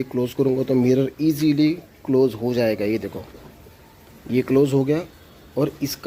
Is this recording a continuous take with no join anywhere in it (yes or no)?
yes